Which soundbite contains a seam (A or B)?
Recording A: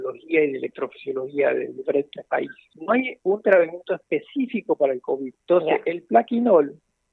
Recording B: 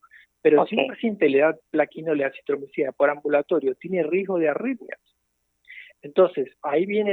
A